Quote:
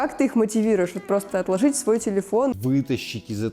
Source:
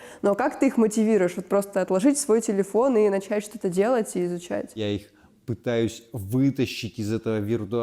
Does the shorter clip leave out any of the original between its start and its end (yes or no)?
yes